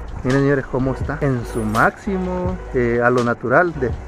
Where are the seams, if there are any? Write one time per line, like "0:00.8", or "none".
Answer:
0:01.1
0:02.6

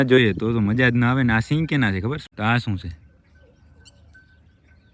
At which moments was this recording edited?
0:02.2

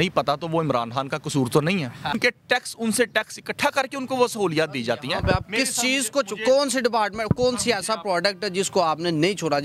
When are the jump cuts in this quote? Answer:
0:02.2

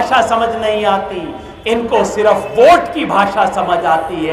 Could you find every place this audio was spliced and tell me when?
none

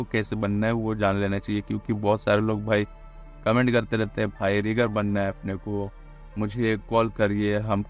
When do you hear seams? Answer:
none

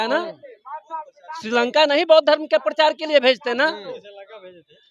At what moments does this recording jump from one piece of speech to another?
none

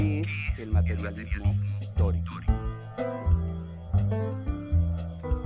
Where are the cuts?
0:01.0

